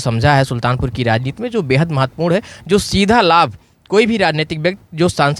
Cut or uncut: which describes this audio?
uncut